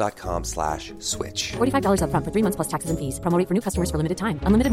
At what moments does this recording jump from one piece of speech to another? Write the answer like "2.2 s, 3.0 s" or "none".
none

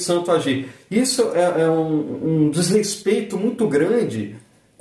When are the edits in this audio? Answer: none

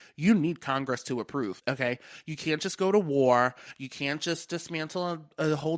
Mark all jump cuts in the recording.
1.6 s

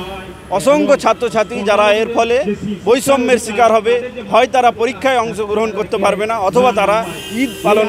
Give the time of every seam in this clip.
none

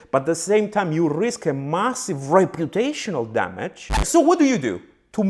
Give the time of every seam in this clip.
4.0 s

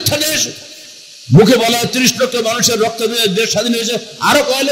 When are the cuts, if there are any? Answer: none

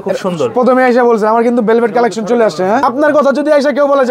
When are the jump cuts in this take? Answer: 2.8 s

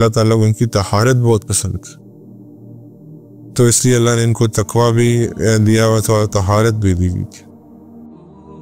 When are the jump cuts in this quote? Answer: 7.3 s

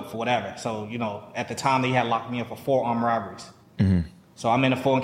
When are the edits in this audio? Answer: none

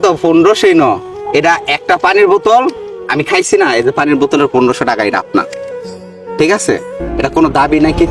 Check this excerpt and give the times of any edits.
1.1 s

